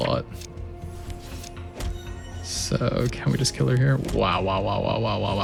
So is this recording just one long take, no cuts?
yes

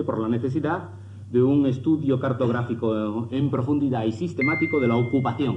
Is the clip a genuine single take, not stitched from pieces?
yes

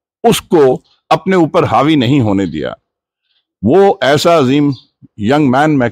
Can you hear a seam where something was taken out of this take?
no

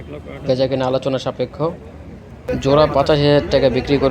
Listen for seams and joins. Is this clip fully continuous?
no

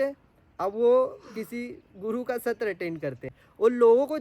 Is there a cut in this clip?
yes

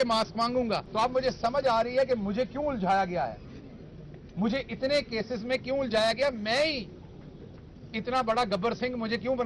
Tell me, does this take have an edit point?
yes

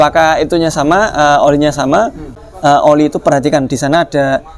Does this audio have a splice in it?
yes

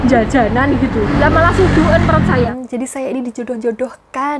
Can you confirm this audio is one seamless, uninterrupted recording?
no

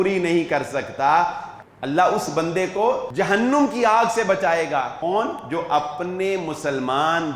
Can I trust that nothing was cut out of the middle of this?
no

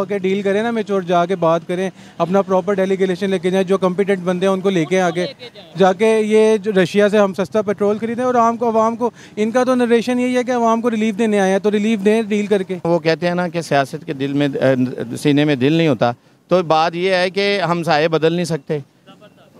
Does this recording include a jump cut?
yes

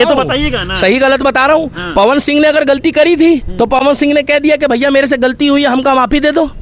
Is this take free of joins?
yes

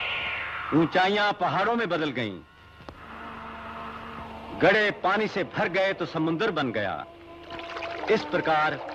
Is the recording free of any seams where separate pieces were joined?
no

